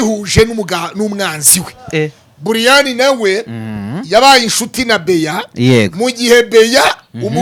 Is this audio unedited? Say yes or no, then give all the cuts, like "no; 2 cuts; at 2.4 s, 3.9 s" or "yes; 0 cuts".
yes; 0 cuts